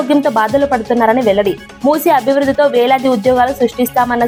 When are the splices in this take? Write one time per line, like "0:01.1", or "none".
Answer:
none